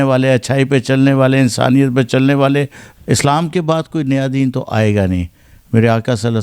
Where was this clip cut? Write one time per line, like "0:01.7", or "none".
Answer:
0:02.8